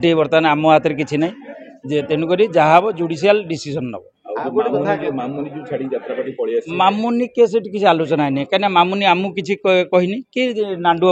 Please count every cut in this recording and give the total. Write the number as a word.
zero